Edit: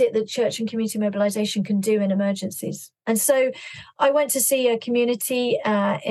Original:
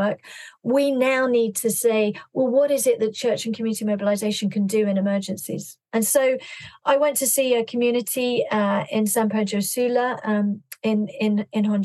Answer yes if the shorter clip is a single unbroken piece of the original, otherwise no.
yes